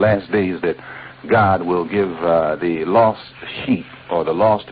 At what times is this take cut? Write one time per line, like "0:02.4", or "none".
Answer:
none